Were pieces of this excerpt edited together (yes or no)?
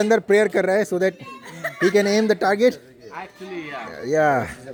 no